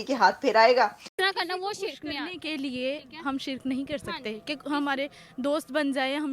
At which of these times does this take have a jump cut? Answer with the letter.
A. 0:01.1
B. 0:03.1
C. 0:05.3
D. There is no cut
A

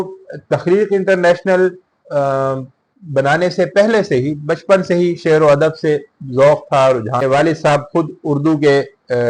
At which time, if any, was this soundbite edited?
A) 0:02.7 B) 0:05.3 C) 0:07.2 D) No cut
C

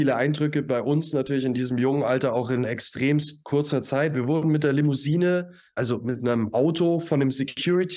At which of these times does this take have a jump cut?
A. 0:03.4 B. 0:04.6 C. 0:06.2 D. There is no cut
D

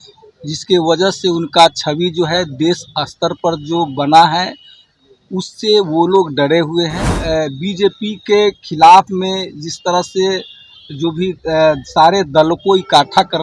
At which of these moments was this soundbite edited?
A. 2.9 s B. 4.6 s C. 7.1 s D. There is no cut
C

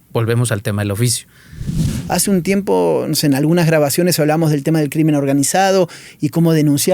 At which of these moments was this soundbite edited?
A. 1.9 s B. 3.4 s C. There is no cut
A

